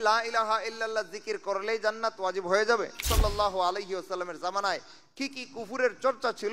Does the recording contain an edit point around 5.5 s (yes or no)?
no